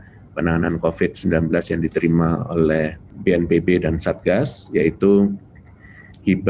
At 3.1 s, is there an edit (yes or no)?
yes